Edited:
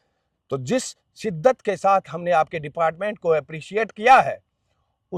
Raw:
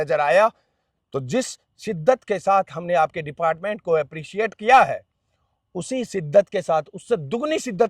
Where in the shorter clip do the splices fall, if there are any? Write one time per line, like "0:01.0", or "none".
none